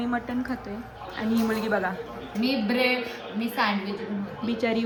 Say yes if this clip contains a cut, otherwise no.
no